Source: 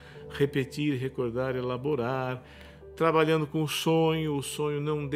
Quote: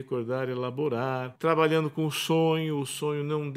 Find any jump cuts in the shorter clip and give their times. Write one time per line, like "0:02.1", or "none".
0:01.3